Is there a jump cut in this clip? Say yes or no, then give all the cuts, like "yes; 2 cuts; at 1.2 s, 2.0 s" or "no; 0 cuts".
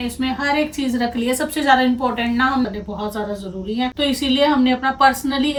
no; 0 cuts